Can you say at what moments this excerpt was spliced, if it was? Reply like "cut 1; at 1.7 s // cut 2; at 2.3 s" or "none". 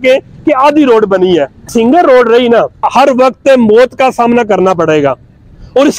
cut 1; at 1.7 s // cut 2; at 2.9 s